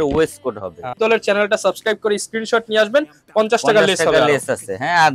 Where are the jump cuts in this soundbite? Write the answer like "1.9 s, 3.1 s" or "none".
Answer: 0.9 s